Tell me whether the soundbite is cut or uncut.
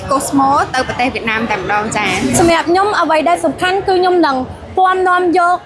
cut